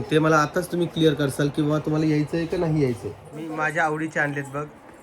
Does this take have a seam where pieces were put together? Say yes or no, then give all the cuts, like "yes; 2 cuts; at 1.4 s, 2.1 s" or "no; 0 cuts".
yes; 1 cut; at 3.3 s